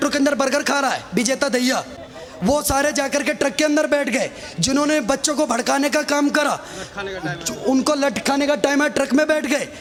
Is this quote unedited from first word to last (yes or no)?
yes